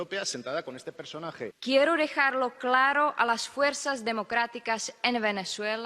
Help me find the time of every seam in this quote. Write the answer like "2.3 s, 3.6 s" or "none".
1.6 s